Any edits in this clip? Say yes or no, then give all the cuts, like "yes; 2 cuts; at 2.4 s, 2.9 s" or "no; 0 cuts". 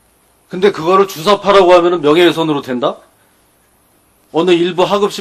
no; 0 cuts